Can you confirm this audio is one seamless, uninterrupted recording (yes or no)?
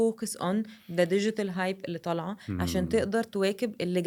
yes